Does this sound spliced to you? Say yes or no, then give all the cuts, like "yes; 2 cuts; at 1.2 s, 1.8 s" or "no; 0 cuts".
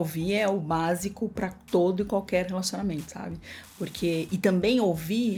no; 0 cuts